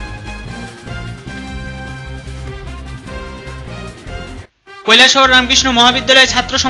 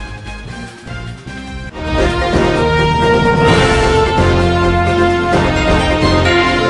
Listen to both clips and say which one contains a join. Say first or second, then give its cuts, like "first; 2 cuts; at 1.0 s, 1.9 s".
first; 1 cut; at 1.5 s